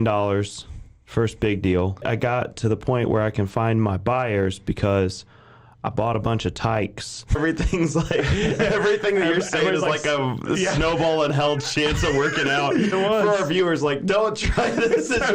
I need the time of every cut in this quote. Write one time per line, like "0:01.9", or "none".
0:02.0
0:07.4
0:12.9

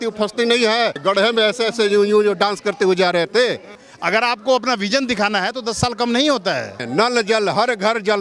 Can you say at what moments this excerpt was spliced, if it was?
0:01.0
0:03.7
0:06.8

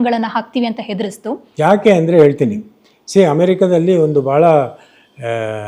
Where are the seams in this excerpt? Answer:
none

